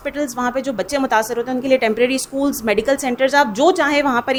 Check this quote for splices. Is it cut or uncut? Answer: uncut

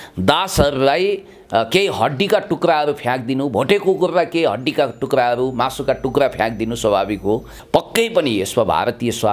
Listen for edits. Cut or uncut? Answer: cut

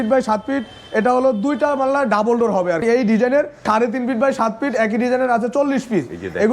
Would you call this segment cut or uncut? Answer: cut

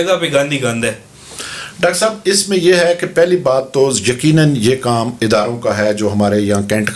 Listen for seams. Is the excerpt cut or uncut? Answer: uncut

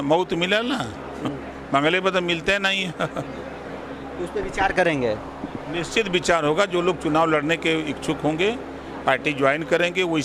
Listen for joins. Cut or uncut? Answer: uncut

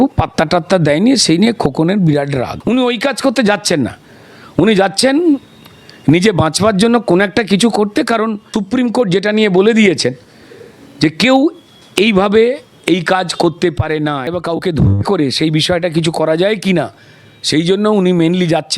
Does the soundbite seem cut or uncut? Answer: cut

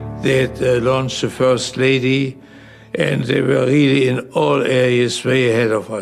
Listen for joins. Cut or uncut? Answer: cut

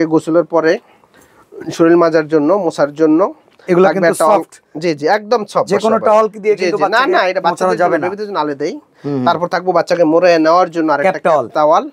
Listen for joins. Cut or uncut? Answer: uncut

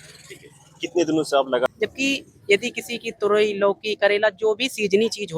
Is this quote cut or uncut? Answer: cut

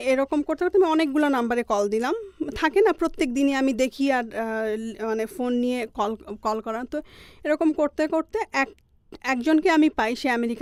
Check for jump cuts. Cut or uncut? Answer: uncut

